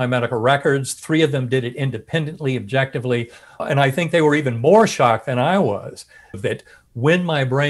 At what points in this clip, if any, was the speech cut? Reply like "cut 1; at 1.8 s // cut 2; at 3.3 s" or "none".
cut 1; at 3.6 s // cut 2; at 6.4 s